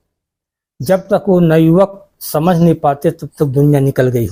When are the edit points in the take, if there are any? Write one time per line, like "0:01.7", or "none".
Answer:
none